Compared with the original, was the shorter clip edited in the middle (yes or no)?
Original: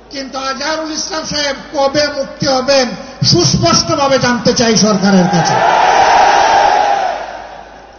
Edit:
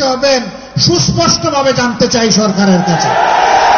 no